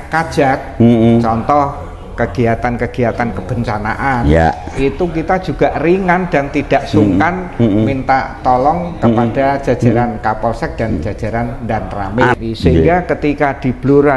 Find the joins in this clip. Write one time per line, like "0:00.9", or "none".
0:12.2